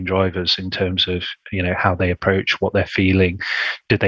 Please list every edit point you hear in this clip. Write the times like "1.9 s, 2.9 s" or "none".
none

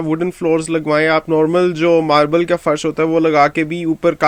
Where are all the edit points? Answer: none

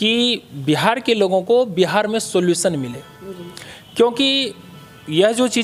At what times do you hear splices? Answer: none

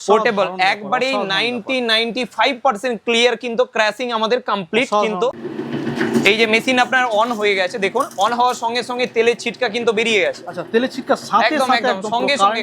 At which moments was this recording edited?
5.4 s

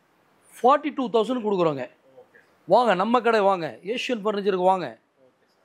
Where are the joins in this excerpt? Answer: none

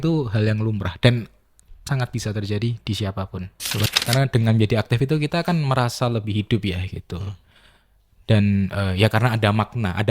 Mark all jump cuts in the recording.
3.9 s

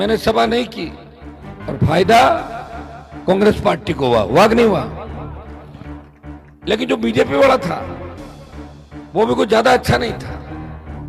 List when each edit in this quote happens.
10.2 s

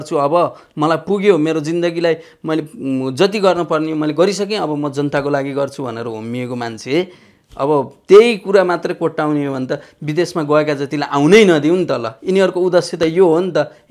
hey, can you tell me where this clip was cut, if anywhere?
none

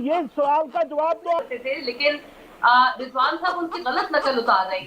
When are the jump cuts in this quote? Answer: 1.4 s

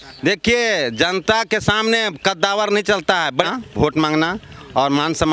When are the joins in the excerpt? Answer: 3.5 s

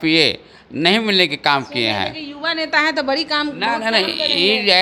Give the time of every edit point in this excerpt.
none

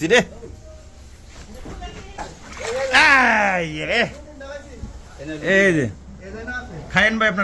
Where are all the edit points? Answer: 2.2 s

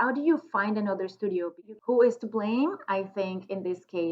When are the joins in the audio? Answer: 1.5 s

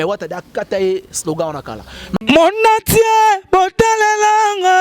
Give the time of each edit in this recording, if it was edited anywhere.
2.2 s

